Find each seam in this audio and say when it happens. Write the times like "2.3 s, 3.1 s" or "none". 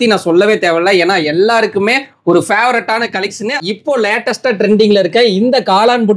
3.6 s